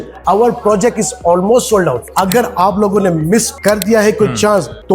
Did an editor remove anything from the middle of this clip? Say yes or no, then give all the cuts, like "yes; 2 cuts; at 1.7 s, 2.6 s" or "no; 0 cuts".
yes; 1 cut; at 2.0 s